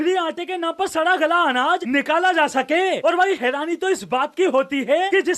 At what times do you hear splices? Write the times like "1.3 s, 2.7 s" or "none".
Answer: none